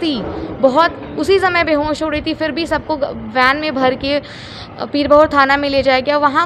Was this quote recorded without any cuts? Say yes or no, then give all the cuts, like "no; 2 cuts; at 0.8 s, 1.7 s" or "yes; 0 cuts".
yes; 0 cuts